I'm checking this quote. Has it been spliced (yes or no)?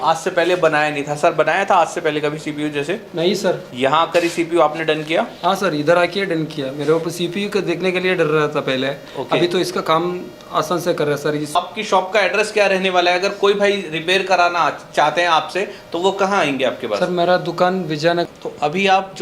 yes